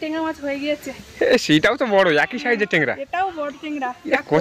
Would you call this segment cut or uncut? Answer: uncut